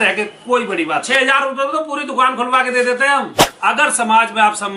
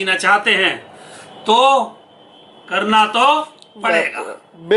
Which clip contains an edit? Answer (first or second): first